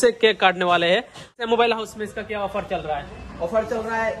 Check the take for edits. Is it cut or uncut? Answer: cut